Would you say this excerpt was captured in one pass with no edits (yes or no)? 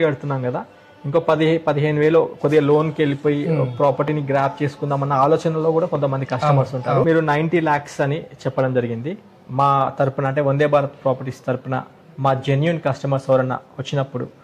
no